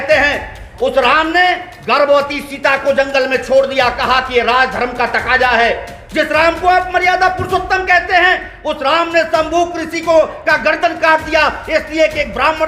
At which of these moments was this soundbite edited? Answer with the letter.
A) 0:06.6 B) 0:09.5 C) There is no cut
C